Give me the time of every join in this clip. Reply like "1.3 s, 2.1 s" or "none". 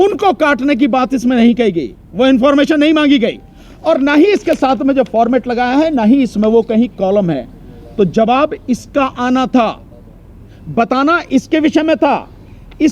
none